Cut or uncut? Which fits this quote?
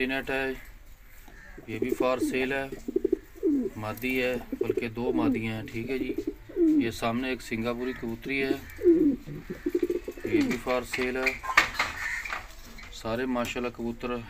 uncut